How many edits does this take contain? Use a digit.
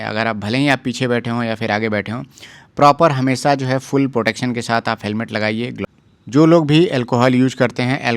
1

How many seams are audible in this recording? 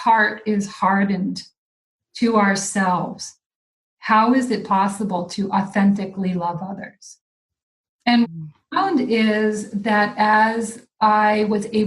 1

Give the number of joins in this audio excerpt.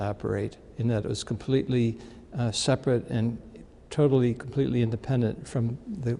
1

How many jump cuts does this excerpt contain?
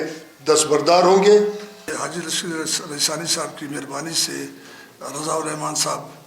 1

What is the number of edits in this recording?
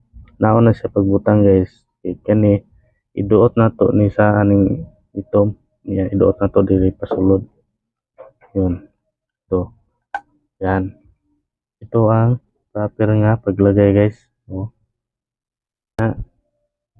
1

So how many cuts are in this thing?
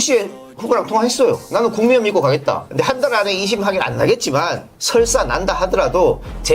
2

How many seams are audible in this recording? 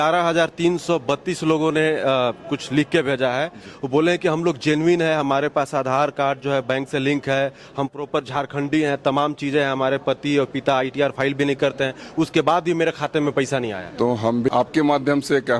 1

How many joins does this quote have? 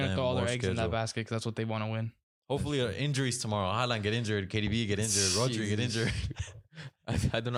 0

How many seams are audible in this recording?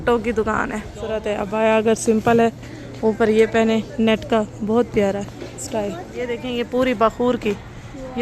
2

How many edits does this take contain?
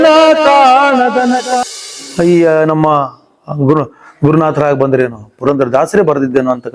1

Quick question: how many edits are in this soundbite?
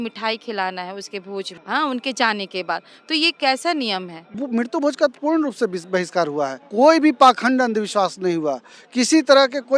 3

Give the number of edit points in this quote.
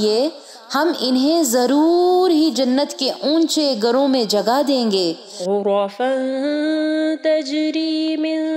0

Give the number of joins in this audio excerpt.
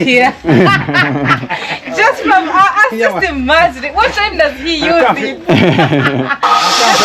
0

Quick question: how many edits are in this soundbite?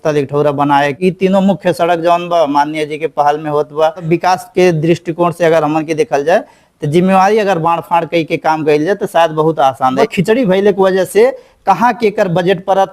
3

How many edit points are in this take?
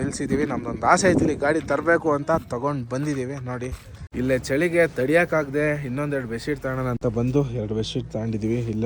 1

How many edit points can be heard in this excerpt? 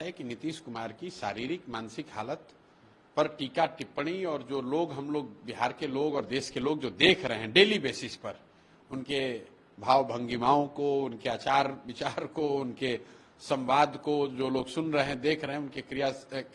0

